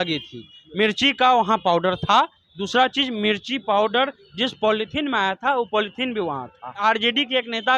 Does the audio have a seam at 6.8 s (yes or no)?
yes